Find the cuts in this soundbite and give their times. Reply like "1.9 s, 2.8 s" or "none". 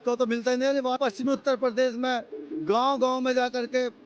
1.0 s